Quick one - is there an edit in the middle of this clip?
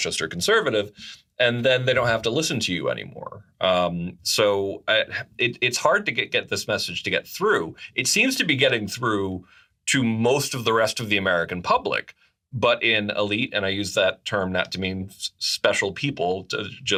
no; 0 cuts

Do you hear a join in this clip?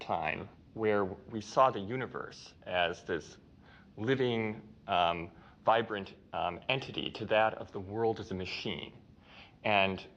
no; 0 cuts

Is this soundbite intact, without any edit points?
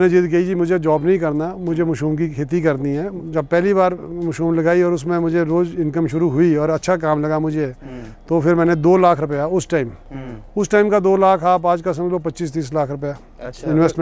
no; 1 cut; at 3.2 s

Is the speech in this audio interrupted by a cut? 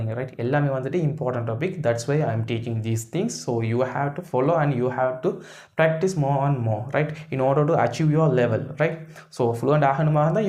no; 0 cuts

